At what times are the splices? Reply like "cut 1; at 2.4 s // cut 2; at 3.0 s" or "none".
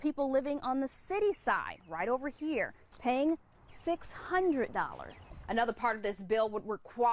cut 1; at 5.3 s